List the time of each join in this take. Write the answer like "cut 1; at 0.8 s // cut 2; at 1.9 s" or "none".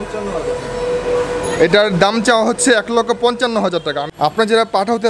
cut 1; at 4.1 s